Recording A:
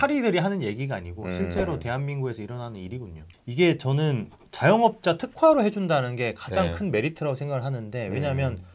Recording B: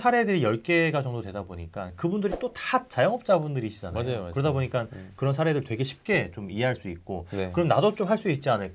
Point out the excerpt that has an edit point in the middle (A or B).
A